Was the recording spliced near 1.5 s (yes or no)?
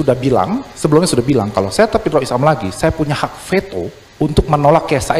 no